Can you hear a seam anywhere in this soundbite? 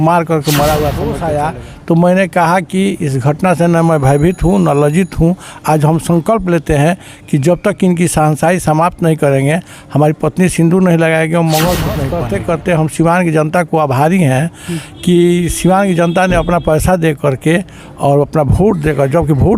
yes; 2 cuts; at 1.2 s, 12.2 s

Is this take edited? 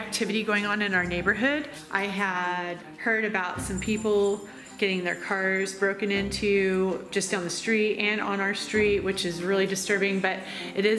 no; 0 cuts

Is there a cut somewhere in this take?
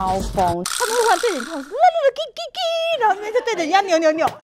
no; 0 cuts

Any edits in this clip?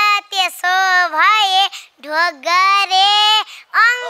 no; 0 cuts

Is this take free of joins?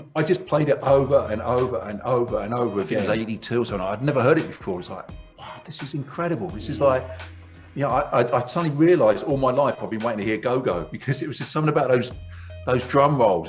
no; 1 cut; at 3.0 s

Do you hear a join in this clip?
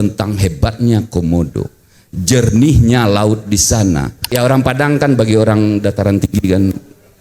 yes; 1 cut; at 4.2 s

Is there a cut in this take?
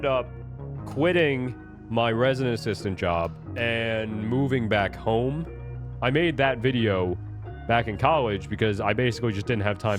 yes; 2 cuts; at 3.4 s, 5.8 s

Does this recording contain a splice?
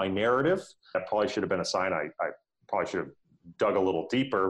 yes; 1 cut; at 0.9 s

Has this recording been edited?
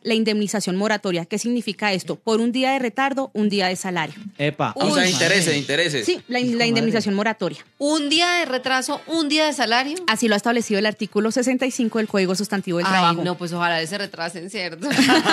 no; 0 cuts

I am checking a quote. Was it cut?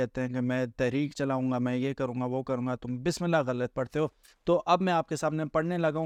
no; 0 cuts

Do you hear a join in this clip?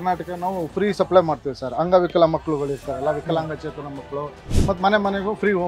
yes; 1 cut; at 4.5 s

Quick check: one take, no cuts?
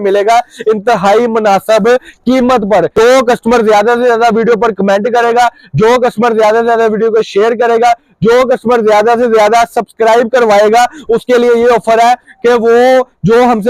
no; 1 cut; at 2.9 s

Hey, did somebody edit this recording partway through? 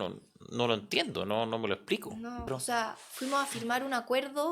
yes; 1 cut; at 2.4 s

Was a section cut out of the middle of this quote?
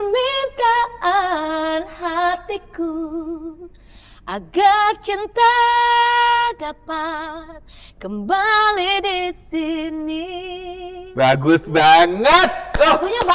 no; 0 cuts

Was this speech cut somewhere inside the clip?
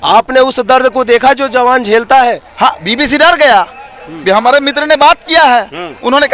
yes; 1 cut; at 2.5 s

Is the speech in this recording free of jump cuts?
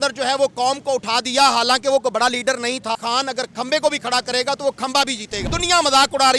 no; 2 cuts; at 3.0 s, 5.5 s

